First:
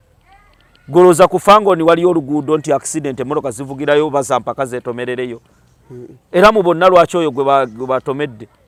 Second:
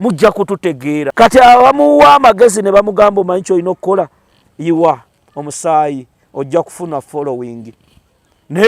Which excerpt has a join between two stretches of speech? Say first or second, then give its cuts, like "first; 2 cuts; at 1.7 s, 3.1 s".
second; 1 cut; at 1.1 s